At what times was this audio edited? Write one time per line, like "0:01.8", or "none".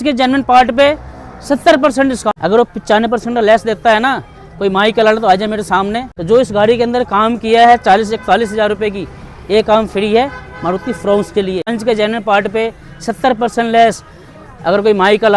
0:02.4
0:06.1
0:11.8